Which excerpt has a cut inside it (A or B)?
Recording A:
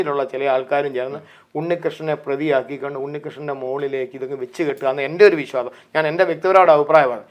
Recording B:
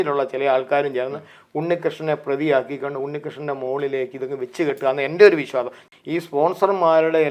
B